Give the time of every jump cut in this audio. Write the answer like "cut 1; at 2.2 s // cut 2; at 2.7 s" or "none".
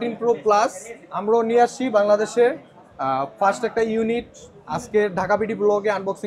none

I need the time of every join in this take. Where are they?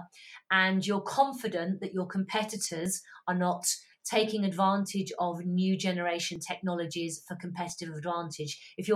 none

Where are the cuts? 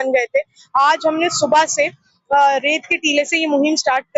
none

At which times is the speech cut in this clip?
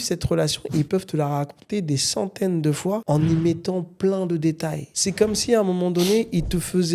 cut 1; at 4.9 s

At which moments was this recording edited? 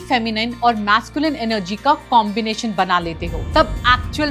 none

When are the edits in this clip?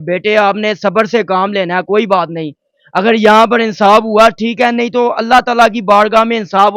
none

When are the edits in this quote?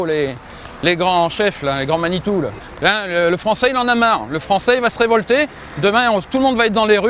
cut 1; at 2.6 s

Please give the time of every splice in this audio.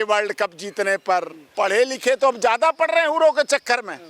cut 1; at 1.4 s

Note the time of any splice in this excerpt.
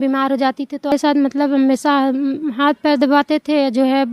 cut 1; at 0.9 s

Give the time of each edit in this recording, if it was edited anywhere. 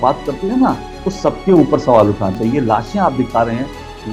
cut 1; at 2.4 s

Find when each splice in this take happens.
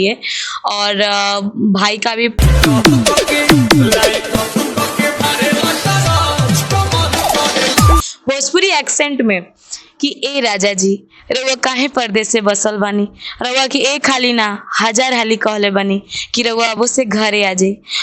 cut 1; at 2.4 s // cut 2; at 8.1 s

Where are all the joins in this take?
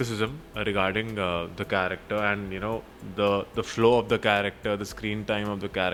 none

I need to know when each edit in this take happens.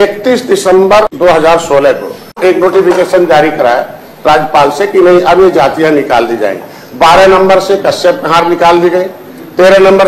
cut 1; at 1.1 s // cut 2; at 2.4 s

